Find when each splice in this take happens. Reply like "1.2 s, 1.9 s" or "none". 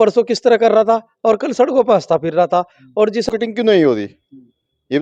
3.3 s